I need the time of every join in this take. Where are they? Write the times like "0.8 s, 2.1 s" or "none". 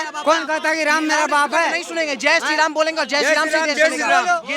none